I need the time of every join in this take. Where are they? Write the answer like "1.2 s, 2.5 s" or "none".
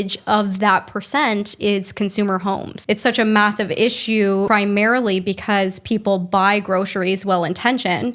2.7 s, 4.5 s